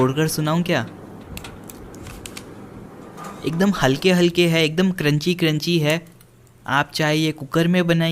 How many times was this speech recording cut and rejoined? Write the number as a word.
two